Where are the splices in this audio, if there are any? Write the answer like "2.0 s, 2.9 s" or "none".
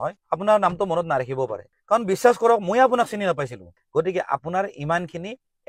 3.8 s